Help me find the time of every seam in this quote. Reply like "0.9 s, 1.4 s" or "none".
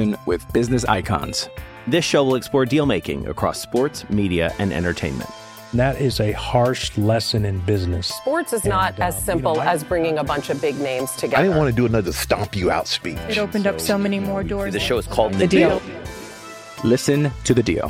none

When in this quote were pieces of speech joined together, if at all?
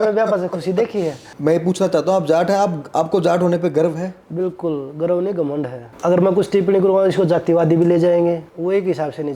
1.2 s, 5.8 s, 8.5 s

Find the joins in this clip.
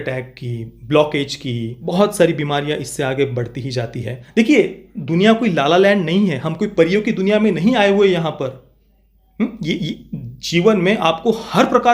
1.8 s, 4.1 s

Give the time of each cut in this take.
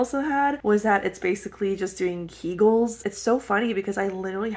3.0 s

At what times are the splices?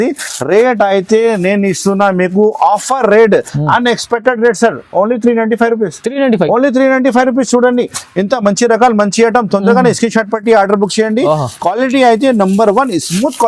none

